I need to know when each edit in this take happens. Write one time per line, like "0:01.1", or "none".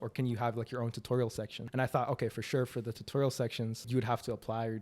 0:01.6
0:03.9